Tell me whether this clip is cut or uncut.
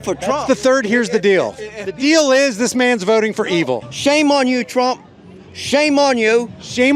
cut